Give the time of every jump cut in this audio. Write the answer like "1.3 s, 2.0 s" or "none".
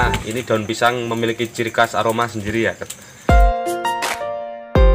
3.1 s